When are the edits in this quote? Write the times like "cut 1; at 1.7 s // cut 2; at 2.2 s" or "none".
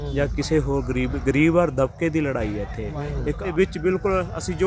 cut 1; at 3.4 s